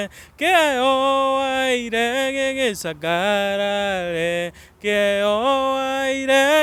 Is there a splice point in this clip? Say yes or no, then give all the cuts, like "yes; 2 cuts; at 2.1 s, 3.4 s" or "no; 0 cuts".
no; 0 cuts